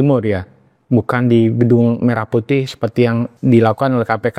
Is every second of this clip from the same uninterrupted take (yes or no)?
no